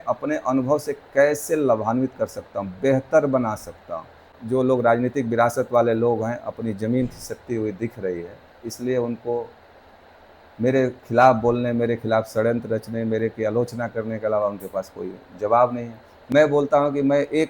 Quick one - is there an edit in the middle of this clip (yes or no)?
yes